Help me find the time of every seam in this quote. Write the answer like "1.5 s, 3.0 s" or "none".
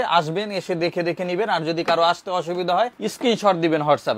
3.0 s